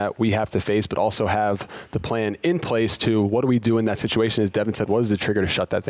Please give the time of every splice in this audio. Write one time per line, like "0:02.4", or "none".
none